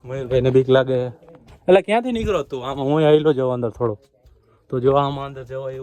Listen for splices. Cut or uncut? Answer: uncut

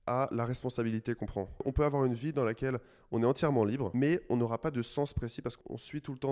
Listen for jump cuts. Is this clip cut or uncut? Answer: cut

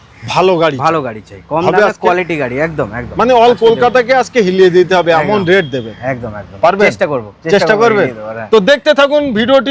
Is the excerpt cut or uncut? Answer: uncut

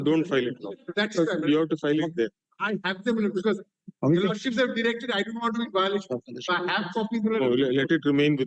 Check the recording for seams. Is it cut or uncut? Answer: uncut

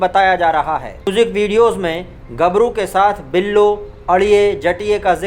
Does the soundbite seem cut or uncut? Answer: cut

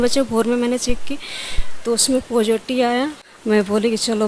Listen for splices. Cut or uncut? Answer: cut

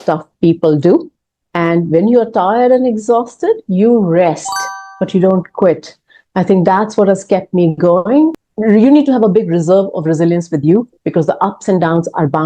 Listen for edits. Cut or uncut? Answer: cut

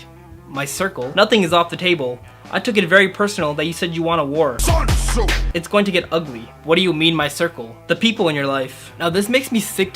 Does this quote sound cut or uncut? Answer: uncut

